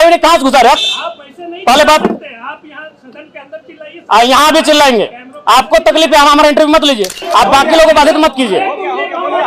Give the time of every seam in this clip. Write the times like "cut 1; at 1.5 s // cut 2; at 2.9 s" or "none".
cut 1; at 7.2 s